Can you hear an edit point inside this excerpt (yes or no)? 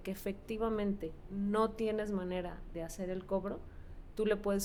no